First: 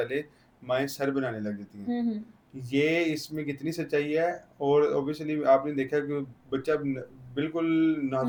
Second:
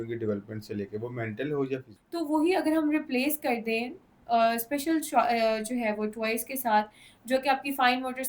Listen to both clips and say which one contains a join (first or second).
second